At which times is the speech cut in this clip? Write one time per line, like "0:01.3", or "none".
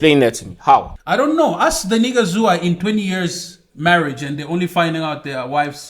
0:01.0